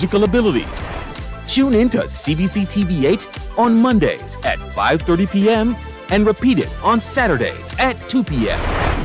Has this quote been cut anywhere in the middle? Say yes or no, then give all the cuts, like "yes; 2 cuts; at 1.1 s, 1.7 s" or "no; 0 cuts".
yes; 1 cut; at 2.3 s